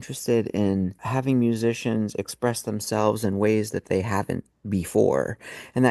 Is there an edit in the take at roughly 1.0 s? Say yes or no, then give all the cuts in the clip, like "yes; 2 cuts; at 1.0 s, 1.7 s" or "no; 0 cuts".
yes; 1 cut; at 1.0 s